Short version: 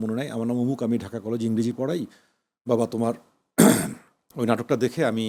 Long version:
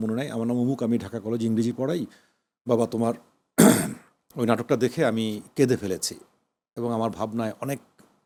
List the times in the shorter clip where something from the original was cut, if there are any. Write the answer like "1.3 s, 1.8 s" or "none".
none